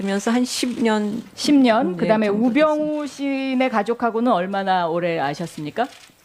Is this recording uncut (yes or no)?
yes